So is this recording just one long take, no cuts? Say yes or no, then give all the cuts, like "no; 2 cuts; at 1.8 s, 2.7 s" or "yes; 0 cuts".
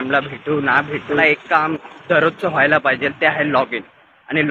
no; 1 cut; at 1.2 s